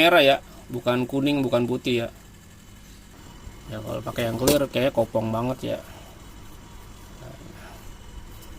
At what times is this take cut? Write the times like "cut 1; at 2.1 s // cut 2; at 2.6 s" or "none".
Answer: cut 1; at 3.1 s